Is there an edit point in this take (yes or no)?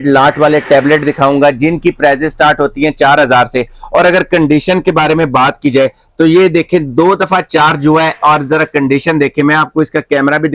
no